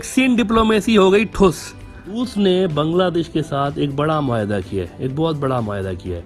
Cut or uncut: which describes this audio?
cut